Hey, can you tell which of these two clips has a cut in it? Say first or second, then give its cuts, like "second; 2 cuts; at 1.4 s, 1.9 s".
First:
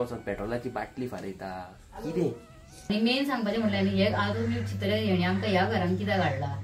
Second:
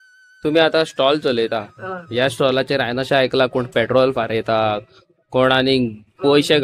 first; 1 cut; at 2.7 s